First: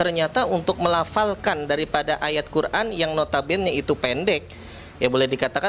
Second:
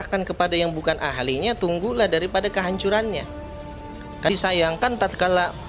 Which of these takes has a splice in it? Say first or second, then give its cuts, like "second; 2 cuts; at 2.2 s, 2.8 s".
second; 1 cut; at 4.3 s